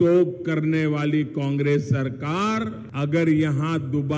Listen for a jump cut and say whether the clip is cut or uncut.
cut